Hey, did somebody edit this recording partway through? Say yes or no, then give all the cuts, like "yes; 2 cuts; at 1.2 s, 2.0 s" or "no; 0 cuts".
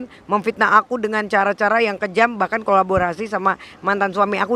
no; 0 cuts